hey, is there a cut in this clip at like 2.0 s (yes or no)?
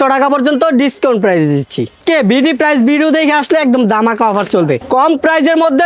yes